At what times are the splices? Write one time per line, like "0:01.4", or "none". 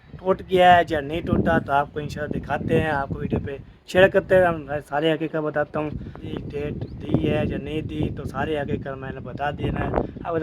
0:06.3